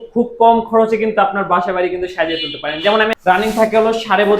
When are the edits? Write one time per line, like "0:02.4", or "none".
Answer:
0:03.4